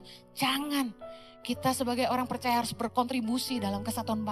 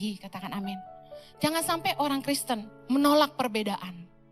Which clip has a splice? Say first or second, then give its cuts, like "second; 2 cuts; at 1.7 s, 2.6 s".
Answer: second; 1 cut; at 2.7 s